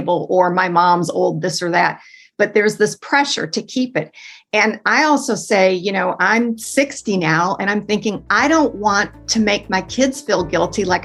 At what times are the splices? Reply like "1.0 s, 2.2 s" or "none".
none